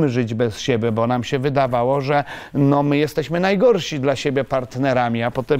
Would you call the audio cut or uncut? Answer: uncut